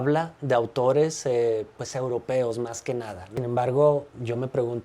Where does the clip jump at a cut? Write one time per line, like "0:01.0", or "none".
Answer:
0:03.3